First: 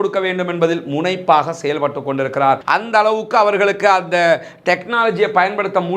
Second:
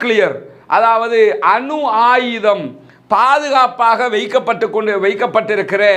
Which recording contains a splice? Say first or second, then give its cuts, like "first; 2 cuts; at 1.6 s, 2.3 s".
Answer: first; 1 cut; at 2.6 s